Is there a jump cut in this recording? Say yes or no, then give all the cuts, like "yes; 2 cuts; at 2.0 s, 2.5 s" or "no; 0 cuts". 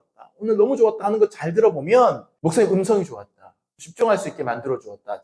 yes; 2 cuts; at 2.3 s, 3.8 s